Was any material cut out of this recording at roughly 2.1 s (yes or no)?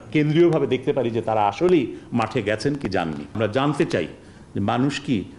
no